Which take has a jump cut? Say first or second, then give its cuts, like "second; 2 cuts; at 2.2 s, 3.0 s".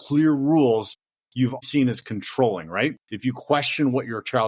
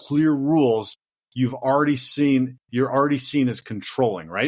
first; 2 cuts; at 1.6 s, 3.1 s